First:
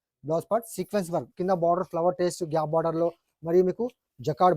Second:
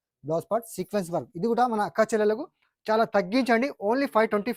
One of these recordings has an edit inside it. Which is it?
first; 1 cut; at 1.3 s

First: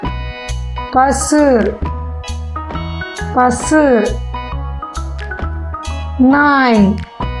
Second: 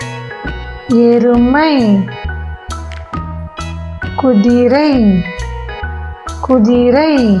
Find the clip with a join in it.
first; 4 cuts; at 1.8 s, 3.3 s, 4.4 s, 5.9 s

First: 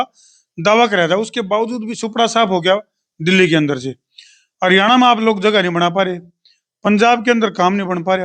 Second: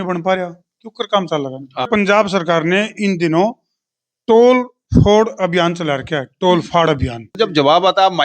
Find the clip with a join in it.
second; 2 cuts; at 1.9 s, 7.2 s

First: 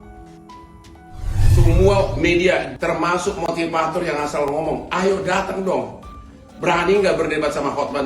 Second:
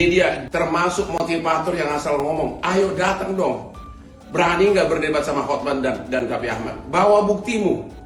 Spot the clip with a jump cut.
first; 1 cut; at 1.3 s

